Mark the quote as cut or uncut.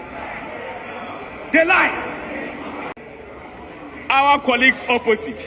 cut